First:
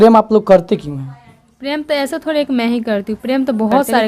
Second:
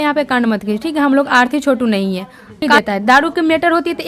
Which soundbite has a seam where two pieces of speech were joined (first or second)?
second